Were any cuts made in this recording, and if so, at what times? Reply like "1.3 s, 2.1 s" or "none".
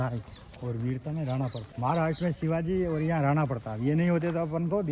1.6 s